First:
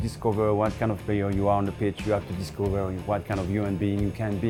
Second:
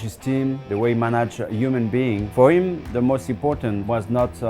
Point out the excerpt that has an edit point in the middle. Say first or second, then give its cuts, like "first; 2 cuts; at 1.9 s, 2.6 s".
second; 1 cut; at 2.2 s